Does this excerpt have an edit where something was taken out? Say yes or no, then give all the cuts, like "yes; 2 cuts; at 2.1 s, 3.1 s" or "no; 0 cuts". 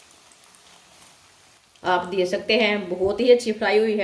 no; 0 cuts